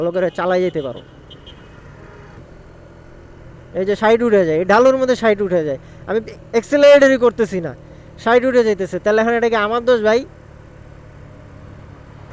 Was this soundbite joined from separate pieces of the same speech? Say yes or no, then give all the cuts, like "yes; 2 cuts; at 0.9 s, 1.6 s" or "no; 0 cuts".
yes; 1 cut; at 2.4 s